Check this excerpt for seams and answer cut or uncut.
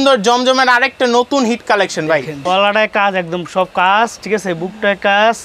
cut